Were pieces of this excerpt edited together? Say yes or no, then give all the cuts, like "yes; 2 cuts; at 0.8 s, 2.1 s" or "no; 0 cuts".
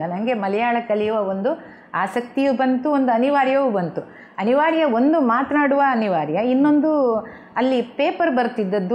no; 0 cuts